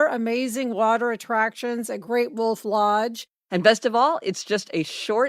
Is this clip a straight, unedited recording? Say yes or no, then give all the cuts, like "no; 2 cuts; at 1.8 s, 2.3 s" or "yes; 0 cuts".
no; 1 cut; at 3.3 s